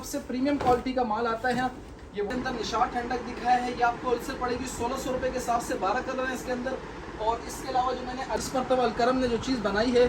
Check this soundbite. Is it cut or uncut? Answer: cut